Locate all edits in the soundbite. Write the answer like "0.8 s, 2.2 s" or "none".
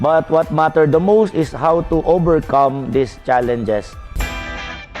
4.0 s